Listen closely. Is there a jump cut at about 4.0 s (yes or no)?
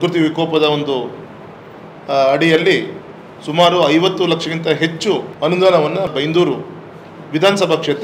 no